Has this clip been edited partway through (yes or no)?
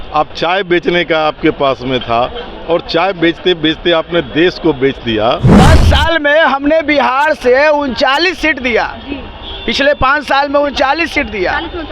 yes